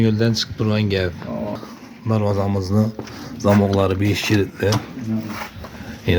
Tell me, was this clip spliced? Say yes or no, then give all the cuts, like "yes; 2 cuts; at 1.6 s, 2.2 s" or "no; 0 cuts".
yes; 1 cut; at 1.8 s